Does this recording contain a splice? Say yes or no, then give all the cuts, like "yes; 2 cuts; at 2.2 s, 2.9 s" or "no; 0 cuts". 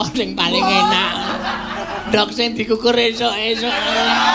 yes; 1 cut; at 2.0 s